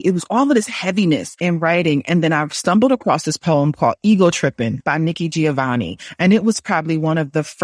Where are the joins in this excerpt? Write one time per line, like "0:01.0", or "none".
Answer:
0:01.3
0:04.8